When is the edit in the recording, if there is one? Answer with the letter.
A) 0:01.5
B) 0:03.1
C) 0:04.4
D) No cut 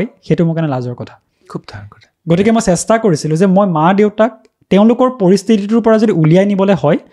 D